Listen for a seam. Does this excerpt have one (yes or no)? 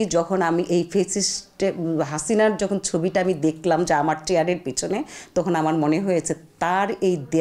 no